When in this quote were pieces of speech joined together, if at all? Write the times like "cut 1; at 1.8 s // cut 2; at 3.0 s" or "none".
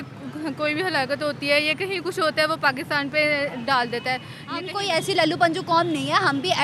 cut 1; at 4.7 s